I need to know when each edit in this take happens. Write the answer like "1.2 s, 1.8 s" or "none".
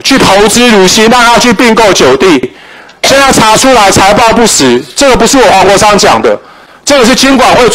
none